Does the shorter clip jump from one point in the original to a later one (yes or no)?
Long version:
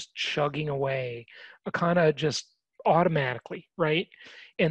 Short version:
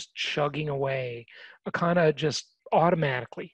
yes